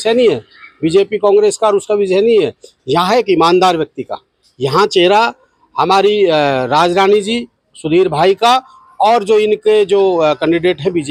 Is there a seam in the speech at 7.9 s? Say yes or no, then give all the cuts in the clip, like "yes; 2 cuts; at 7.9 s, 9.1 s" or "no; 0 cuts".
no; 0 cuts